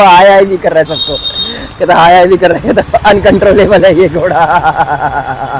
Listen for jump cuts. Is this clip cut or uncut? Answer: uncut